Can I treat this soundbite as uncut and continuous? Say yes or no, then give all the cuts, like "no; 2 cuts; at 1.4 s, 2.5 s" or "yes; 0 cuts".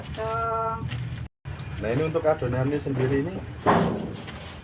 no; 1 cut; at 1.2 s